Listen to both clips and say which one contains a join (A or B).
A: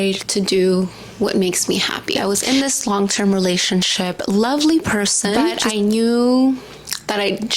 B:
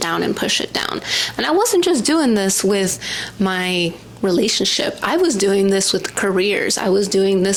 A